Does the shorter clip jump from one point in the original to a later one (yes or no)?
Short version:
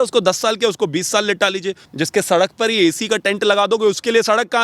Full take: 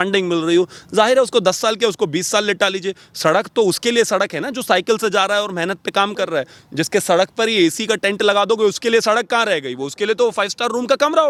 yes